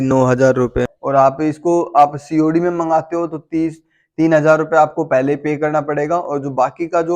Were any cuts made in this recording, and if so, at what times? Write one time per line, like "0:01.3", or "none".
0:00.9